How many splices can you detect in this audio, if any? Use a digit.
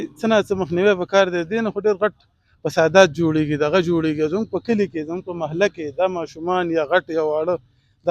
0